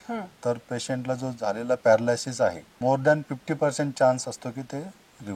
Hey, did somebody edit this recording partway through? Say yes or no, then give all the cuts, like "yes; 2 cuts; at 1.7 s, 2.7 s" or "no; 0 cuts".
yes; 1 cut; at 2.8 s